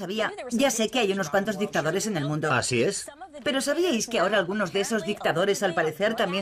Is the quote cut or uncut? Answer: uncut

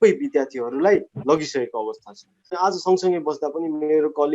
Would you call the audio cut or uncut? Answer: cut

